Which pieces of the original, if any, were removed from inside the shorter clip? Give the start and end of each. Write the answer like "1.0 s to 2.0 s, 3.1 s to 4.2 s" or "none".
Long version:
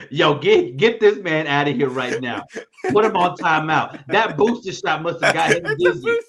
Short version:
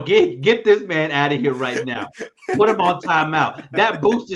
none